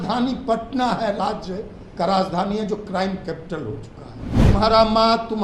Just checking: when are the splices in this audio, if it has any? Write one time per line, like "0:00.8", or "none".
0:04.4